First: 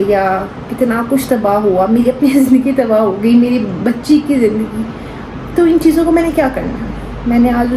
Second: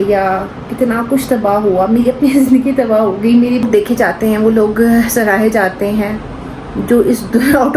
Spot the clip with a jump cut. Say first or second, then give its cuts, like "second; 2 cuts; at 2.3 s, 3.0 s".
second; 1 cut; at 3.7 s